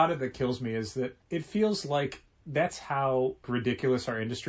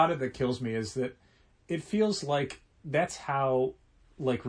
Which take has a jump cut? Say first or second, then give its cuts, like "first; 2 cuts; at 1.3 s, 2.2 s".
first; 2 cuts; at 1.2 s, 3.5 s